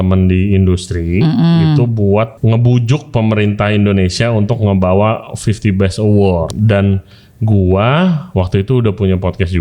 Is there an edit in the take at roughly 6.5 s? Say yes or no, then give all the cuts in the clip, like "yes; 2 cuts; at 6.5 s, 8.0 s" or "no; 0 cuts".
yes; 2 cuts; at 2.4 s, 6.5 s